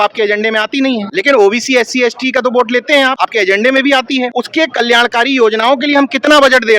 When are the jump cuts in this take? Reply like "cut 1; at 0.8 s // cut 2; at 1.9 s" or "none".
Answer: cut 1; at 1.1 s // cut 2; at 3.2 s // cut 3; at 4.4 s